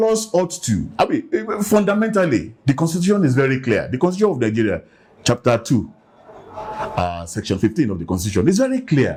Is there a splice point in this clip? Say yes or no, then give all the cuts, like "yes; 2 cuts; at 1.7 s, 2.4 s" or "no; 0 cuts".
no; 0 cuts